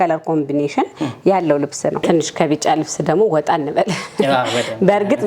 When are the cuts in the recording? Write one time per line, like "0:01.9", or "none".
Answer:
0:02.0